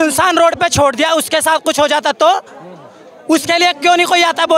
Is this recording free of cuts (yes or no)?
yes